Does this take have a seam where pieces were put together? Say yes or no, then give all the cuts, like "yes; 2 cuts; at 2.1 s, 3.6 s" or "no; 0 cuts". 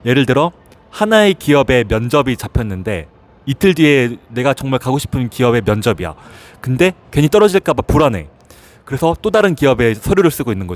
no; 0 cuts